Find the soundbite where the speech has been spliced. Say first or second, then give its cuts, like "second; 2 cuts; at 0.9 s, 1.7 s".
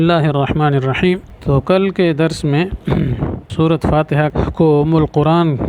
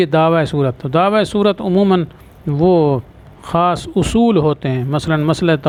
first; 3 cuts; at 1.2 s, 3.4 s, 4.3 s